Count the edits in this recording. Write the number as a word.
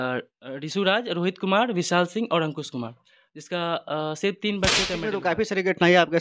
one